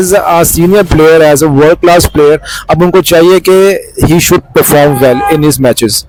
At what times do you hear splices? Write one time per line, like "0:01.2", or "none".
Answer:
none